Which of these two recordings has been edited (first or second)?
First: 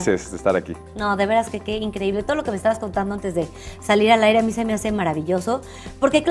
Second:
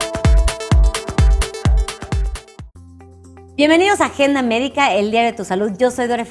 first